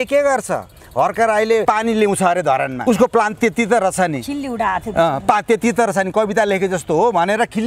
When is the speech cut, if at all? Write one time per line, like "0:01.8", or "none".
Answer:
0:01.6
0:02.8